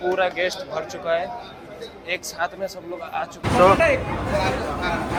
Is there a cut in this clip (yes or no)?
no